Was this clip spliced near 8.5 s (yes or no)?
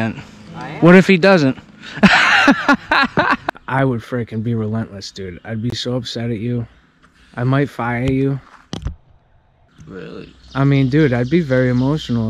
no